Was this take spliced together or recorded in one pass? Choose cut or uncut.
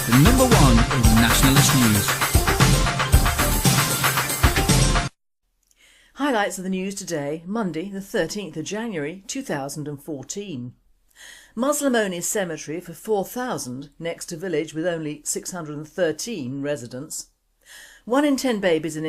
cut